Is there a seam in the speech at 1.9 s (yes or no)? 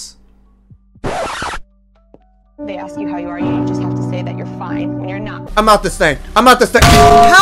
no